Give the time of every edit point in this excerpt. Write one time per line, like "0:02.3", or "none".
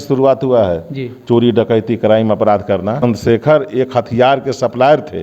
0:03.0